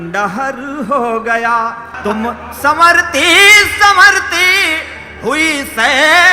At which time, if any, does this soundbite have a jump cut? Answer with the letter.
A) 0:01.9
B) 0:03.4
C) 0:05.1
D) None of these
A